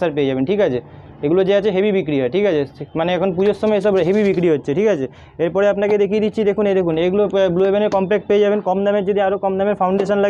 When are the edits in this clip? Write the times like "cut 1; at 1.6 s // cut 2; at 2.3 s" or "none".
none